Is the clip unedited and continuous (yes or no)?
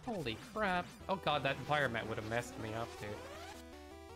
no